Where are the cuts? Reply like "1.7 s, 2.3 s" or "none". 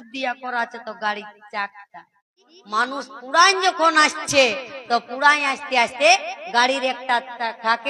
2.5 s